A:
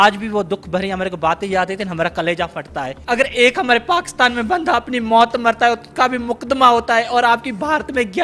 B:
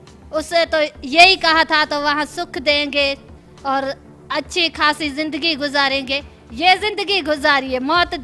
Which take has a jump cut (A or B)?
A